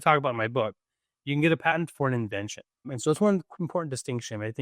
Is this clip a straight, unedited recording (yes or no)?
no